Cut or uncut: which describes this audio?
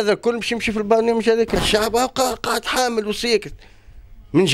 cut